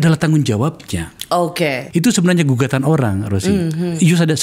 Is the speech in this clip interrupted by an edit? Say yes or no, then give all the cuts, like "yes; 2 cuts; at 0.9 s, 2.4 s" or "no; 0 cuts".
yes; 1 cut; at 1.8 s